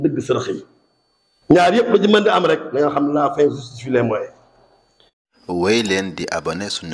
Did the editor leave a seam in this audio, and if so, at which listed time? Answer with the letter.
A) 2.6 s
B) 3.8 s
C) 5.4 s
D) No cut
C